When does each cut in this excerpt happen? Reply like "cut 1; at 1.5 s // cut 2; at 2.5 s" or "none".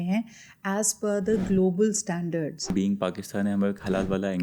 cut 1; at 2.7 s